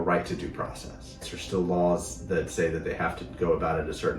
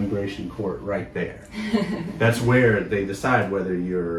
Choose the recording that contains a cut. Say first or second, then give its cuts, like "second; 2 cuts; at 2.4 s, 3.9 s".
first; 1 cut; at 1.3 s